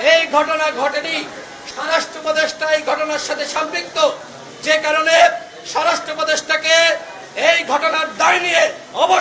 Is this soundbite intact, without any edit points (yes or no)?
yes